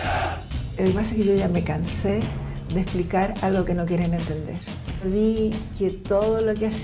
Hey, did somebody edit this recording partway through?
yes; 1 cut; at 3.3 s

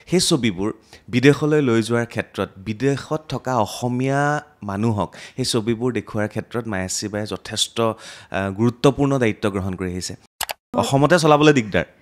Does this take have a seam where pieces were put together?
yes; 1 cut; at 10.3 s

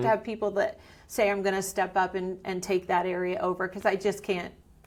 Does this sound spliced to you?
no; 0 cuts

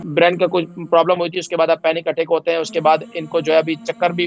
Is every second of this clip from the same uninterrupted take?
yes; 0 cuts

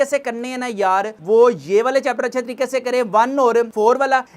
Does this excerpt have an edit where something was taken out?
no; 0 cuts

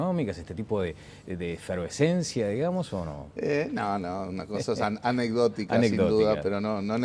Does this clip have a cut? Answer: yes; 1 cut; at 5.8 s

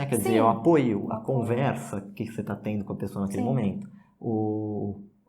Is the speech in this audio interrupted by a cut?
no; 0 cuts

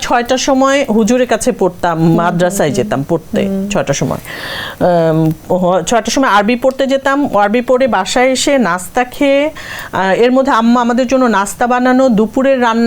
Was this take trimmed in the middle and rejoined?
no; 0 cuts

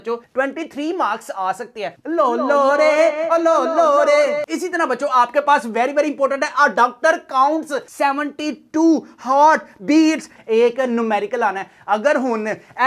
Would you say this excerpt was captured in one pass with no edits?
no; 2 cuts; at 2.0 s, 10.4 s

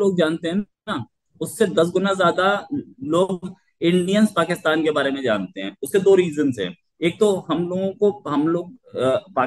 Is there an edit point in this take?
no; 0 cuts

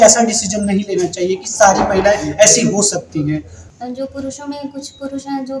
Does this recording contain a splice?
yes; 1 cut; at 3.6 s

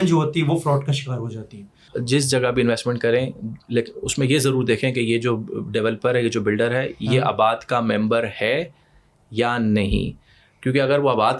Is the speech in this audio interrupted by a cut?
yes; 1 cut; at 1.9 s

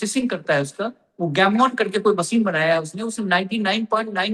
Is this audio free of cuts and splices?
yes; 0 cuts

